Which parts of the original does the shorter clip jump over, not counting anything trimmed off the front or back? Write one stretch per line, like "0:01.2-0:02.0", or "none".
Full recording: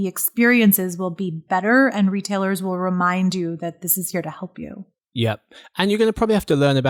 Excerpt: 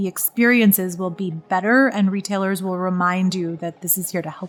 none

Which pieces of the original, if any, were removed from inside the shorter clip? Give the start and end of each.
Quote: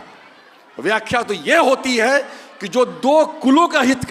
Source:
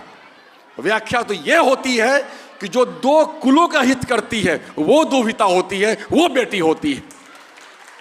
none

